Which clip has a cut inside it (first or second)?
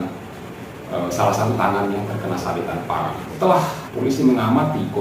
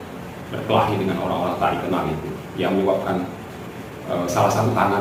first